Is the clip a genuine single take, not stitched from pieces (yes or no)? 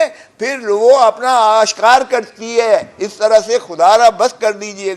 yes